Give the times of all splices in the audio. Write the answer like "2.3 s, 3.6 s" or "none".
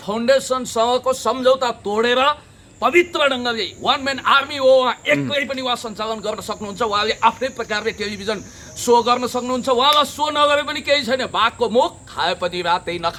none